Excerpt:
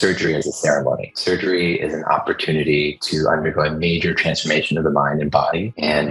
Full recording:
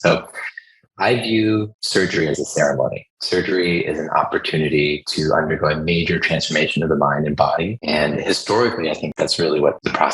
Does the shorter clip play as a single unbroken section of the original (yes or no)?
no